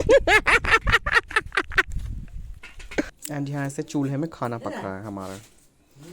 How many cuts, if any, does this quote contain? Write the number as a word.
one